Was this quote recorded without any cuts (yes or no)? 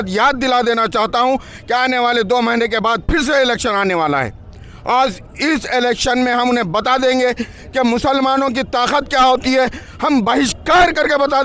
yes